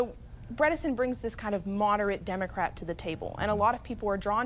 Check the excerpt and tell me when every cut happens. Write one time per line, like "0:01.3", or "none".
none